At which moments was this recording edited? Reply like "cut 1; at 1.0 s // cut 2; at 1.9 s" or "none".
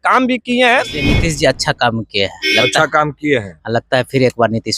cut 1; at 1.1 s